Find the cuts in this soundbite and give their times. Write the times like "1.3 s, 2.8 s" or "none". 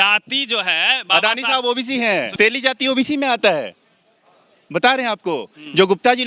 2.3 s